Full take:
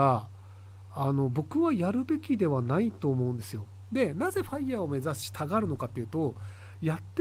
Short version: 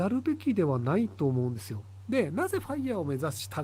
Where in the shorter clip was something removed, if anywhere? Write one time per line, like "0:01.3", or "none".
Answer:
none